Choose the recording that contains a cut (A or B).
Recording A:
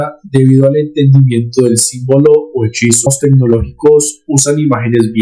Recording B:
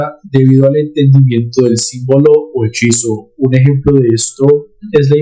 A